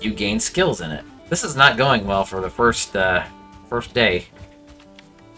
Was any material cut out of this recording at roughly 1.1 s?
yes; 1 cut; at 1.1 s

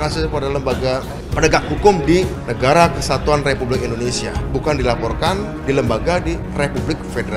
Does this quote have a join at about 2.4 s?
yes; 5 cuts; at 1.2 s, 2.4 s, 4.3 s, 5.5 s, 6.5 s

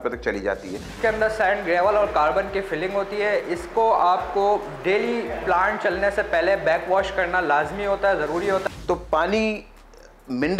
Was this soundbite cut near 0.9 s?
yes; 2 cuts; at 0.9 s, 8.6 s

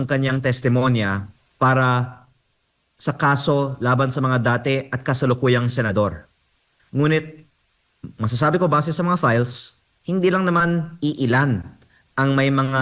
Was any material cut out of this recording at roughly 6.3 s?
no; 0 cuts

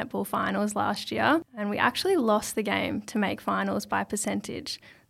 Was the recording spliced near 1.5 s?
yes; 1 cut; at 1.5 s

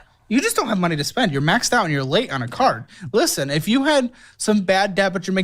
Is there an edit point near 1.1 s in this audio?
yes; 1 cut; at 1.1 s

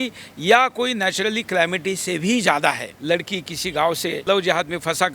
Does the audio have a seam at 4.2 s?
yes; 2 cuts; at 2.9 s, 4.2 s

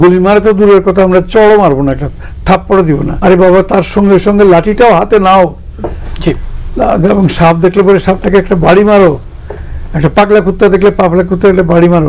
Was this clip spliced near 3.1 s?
yes; 1 cut; at 3.1 s

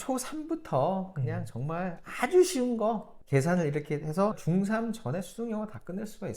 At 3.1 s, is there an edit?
yes; 2 cuts; at 3.1 s, 4.4 s

